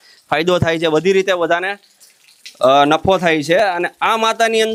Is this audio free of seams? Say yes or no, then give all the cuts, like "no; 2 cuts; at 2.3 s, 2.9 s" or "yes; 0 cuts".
yes; 0 cuts